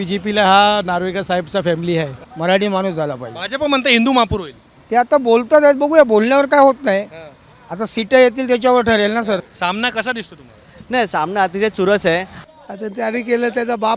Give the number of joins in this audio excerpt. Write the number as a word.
three